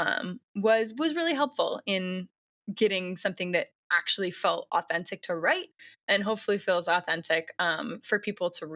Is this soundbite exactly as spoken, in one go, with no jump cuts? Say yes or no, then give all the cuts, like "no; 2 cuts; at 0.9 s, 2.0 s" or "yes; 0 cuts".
yes; 0 cuts